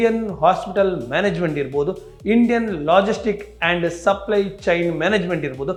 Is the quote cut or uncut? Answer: uncut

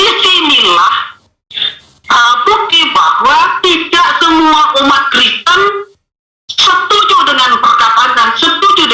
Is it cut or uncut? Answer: uncut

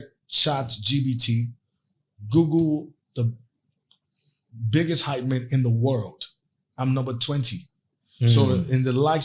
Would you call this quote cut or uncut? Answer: uncut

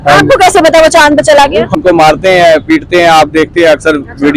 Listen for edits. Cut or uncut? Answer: cut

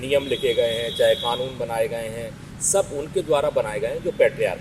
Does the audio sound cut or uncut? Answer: uncut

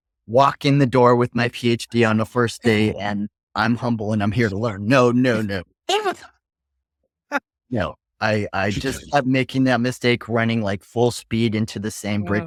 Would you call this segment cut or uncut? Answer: uncut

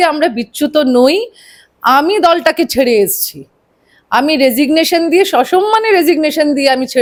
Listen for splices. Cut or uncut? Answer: uncut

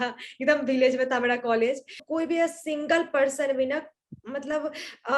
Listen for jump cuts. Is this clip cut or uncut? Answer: cut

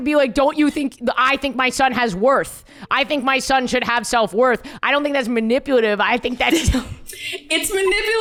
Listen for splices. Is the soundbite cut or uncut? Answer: uncut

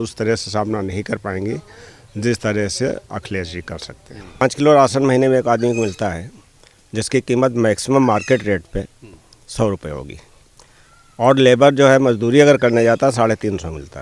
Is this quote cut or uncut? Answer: cut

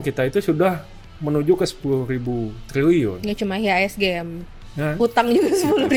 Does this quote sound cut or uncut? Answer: uncut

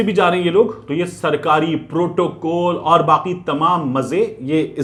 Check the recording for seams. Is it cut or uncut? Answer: uncut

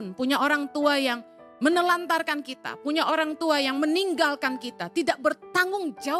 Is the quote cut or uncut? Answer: uncut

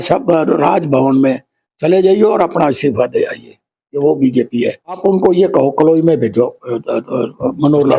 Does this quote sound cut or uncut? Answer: cut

